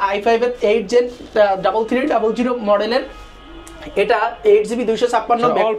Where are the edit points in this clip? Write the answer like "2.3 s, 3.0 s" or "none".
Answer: none